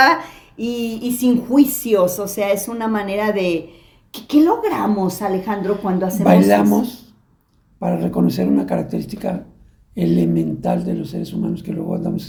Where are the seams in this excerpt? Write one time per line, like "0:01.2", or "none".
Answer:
none